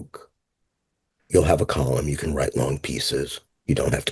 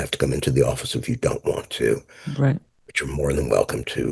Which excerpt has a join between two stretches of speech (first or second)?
first